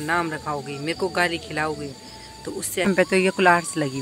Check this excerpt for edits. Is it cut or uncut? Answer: cut